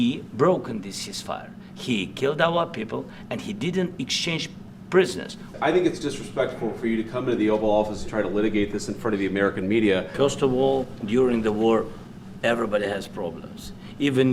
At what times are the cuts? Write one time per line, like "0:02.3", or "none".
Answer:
0:05.5
0:10.1